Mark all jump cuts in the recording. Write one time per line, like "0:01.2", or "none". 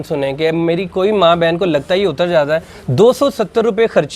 none